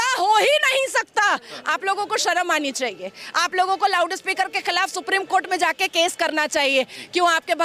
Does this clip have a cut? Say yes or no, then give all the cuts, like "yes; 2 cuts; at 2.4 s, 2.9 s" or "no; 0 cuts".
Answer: no; 0 cuts